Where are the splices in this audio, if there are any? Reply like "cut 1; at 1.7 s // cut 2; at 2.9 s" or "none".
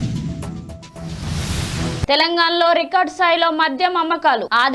cut 1; at 2.1 s